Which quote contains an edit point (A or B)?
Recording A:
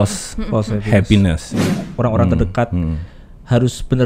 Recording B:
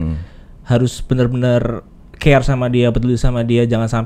A